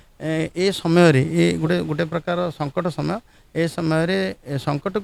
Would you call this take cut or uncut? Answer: uncut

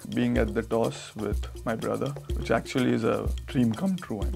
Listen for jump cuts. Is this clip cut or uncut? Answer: cut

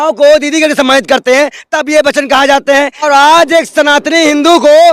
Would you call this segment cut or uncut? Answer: cut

